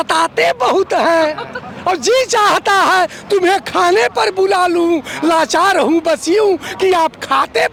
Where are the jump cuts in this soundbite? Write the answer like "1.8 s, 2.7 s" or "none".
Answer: none